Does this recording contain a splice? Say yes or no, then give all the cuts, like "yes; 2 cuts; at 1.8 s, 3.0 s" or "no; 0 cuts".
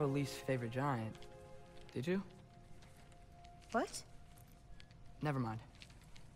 no; 0 cuts